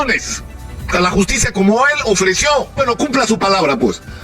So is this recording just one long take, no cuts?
no; 1 cut; at 2.8 s

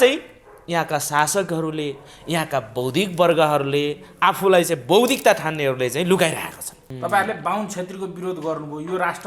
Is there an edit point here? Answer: yes; 1 cut; at 6.9 s

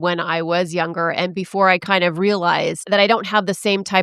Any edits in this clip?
yes; 1 cut; at 2.8 s

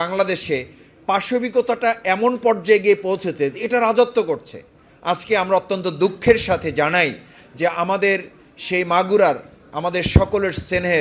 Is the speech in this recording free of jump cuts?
yes; 0 cuts

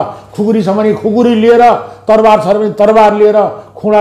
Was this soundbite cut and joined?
no; 0 cuts

